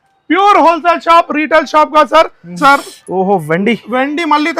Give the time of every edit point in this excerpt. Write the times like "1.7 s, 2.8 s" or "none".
2.6 s